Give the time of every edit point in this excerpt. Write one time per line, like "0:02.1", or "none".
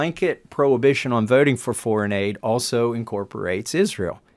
none